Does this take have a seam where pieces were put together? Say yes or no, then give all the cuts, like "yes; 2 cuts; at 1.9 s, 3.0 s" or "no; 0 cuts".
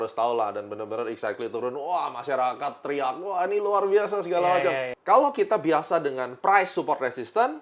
yes; 1 cut; at 4.9 s